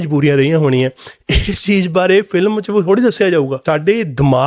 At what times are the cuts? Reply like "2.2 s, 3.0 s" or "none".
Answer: 3.6 s